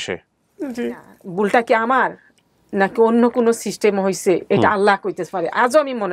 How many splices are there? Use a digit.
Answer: 1